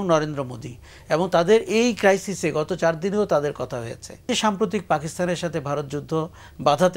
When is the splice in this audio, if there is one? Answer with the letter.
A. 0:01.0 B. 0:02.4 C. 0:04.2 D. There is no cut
C